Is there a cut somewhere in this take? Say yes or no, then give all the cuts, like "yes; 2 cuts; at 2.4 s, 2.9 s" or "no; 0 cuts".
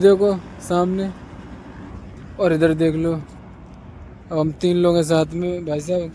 no; 0 cuts